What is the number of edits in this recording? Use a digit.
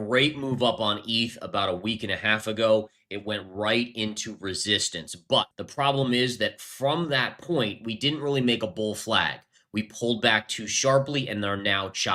0